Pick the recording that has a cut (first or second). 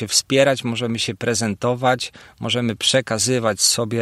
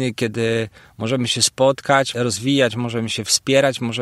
second